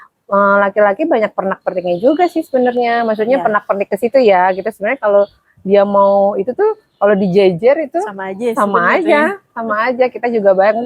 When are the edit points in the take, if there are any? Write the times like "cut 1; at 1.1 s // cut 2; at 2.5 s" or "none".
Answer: none